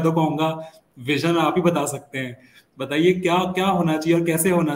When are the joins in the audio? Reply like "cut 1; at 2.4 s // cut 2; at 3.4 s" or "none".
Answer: none